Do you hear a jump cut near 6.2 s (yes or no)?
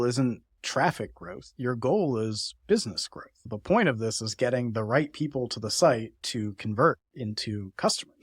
yes